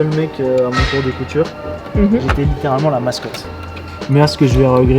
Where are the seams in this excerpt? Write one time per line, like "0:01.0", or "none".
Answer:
0:03.8